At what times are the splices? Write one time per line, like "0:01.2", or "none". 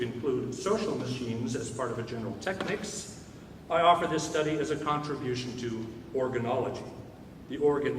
0:05.6